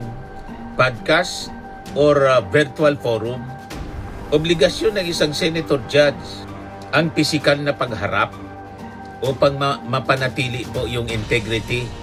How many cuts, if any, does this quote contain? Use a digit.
0